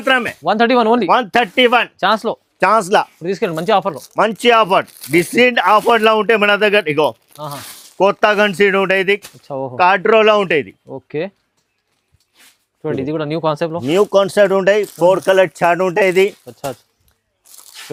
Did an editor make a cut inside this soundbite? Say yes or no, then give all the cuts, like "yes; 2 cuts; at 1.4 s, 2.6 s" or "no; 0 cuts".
no; 0 cuts